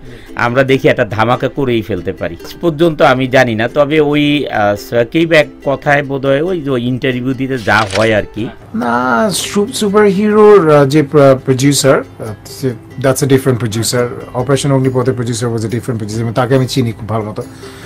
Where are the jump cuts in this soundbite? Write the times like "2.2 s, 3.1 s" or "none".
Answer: 8.6 s